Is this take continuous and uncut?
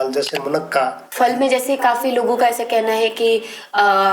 no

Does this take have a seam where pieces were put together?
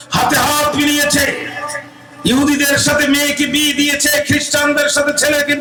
no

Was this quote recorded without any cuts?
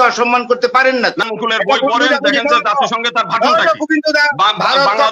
no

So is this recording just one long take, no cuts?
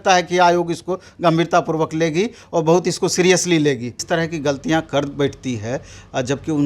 no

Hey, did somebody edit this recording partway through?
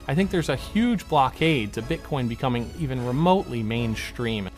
no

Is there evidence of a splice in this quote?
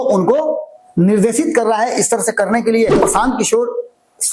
yes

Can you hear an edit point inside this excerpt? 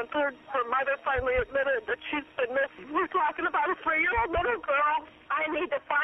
yes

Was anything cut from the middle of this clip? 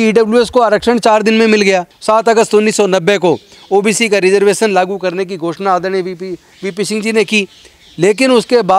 yes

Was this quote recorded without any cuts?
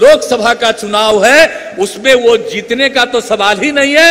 yes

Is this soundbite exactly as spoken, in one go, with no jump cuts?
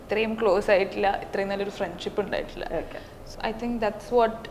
yes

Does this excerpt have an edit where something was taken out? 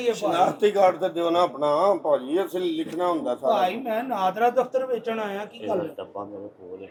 no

